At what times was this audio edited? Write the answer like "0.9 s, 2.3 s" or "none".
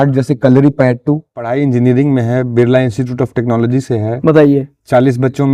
1.5 s